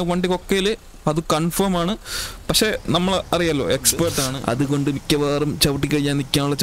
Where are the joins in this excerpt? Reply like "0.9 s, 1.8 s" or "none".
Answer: 4.3 s